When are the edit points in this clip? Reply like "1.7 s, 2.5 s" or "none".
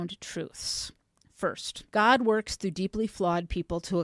1.7 s